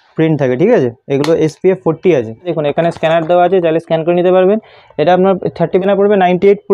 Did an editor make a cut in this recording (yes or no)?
yes